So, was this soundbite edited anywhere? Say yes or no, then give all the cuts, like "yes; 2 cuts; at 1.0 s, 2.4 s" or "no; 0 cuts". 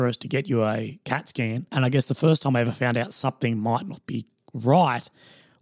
yes; 1 cut; at 1.7 s